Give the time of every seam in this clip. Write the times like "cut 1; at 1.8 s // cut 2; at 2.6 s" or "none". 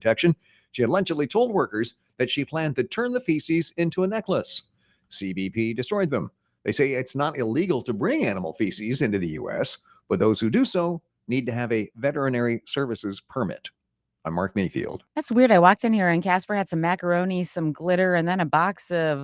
cut 1; at 17.4 s